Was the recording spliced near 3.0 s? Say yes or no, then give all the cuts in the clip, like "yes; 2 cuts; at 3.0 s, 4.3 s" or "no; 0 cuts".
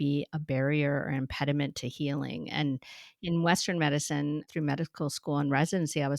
no; 1 cut; at 4.5 s